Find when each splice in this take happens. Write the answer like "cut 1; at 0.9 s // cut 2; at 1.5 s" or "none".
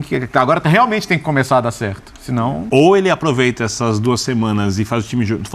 cut 1; at 2.6 s